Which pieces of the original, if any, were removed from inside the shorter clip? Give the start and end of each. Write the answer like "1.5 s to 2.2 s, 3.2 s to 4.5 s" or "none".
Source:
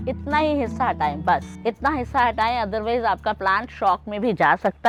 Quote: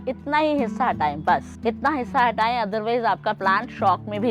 none